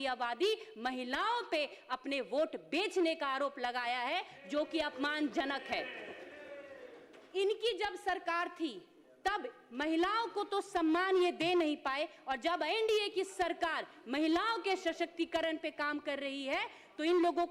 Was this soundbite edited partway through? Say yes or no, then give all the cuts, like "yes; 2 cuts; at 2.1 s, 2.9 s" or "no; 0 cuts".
no; 0 cuts